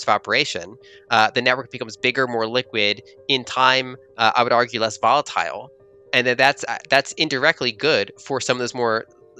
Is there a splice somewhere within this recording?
no; 0 cuts

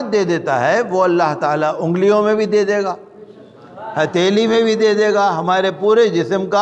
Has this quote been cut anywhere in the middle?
no; 0 cuts

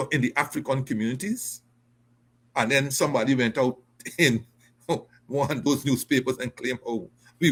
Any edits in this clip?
no; 0 cuts

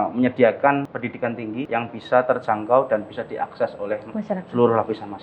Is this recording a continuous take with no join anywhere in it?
no; 1 cut; at 1.2 s

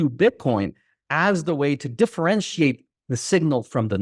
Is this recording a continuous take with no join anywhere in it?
yes; 0 cuts

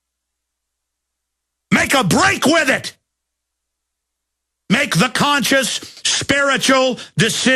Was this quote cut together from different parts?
no; 0 cuts

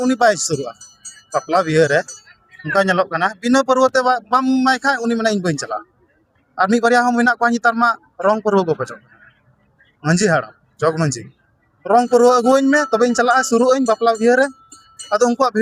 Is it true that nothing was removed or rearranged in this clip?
yes; 0 cuts

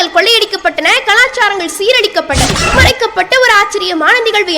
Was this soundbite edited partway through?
yes; 1 cut; at 2.6 s

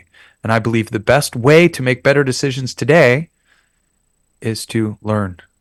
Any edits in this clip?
no; 0 cuts

